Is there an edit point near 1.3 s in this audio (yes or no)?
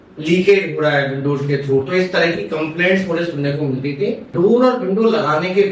no